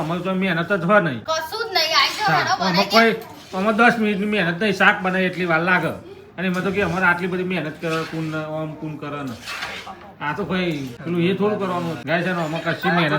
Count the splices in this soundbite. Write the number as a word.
three